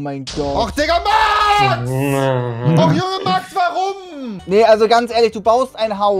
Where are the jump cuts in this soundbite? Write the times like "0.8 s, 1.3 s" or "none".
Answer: none